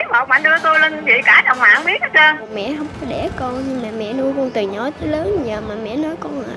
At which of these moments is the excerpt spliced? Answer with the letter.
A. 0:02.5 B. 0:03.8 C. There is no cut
A